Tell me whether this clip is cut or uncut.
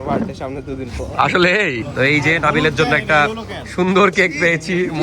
cut